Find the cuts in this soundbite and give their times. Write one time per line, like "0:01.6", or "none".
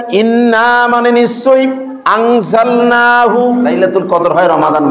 0:03.7